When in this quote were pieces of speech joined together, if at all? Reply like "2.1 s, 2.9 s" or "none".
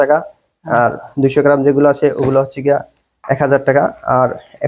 none